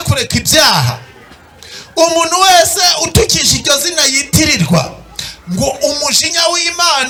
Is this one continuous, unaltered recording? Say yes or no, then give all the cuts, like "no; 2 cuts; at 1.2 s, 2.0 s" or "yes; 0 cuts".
yes; 0 cuts